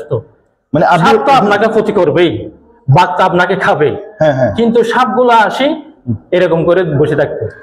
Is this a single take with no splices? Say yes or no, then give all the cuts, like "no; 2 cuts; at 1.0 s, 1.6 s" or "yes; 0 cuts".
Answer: yes; 0 cuts